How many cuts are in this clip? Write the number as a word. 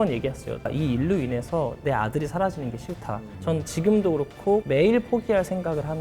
two